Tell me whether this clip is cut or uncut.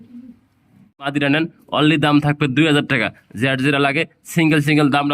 cut